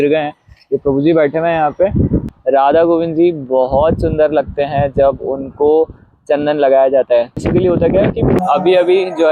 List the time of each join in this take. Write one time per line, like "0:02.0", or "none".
0:02.3
0:08.4